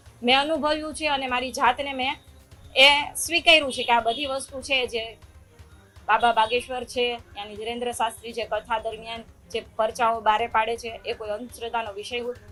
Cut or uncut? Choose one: uncut